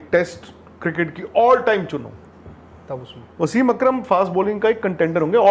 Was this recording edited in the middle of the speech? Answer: no; 0 cuts

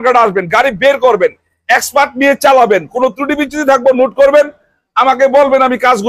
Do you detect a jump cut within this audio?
no; 0 cuts

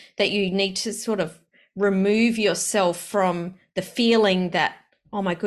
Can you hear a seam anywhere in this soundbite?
no; 0 cuts

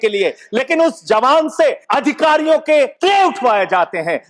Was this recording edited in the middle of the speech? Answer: yes; 2 cuts; at 1.8 s, 2.9 s

